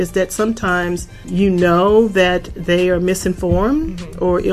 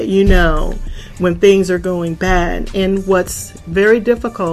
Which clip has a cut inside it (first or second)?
first